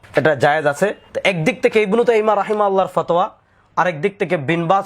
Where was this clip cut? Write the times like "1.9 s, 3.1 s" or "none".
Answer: 1.1 s